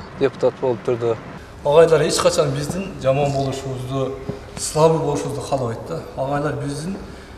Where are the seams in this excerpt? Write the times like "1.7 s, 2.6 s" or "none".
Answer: 1.3 s